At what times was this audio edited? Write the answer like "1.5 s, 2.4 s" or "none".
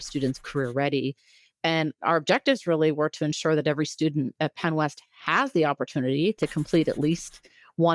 none